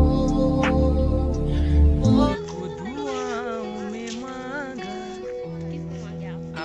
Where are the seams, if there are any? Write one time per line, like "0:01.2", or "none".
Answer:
0:02.3